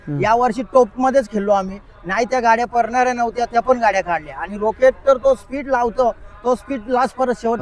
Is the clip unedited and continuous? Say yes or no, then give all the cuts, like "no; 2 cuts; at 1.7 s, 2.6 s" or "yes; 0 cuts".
yes; 0 cuts